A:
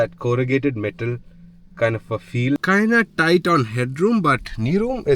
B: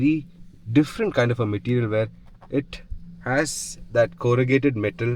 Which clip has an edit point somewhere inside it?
A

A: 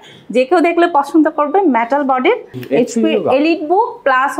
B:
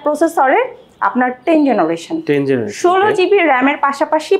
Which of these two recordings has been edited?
A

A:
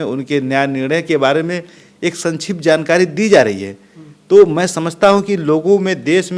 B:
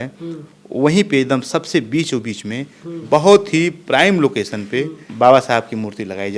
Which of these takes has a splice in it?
B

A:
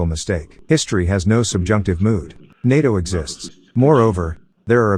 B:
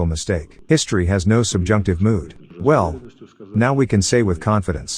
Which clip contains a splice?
B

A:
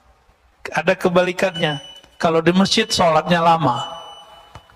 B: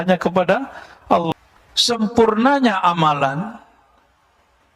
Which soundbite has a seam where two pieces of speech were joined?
B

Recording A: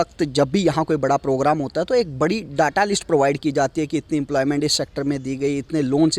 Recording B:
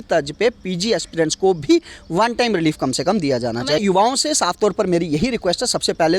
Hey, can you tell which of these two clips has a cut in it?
B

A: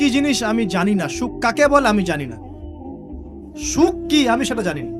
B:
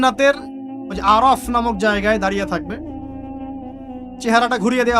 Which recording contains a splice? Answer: B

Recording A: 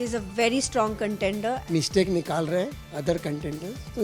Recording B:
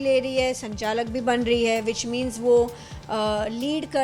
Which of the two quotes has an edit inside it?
A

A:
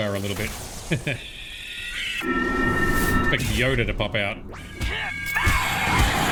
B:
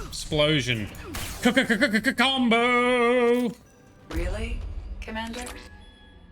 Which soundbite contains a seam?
B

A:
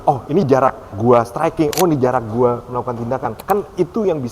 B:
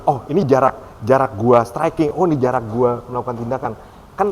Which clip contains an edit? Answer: A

